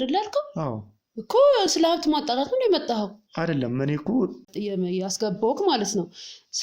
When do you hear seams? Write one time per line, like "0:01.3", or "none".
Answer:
0:04.5